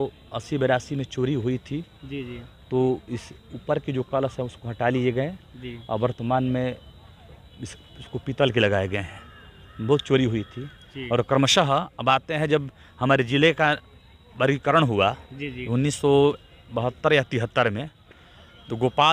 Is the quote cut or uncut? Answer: uncut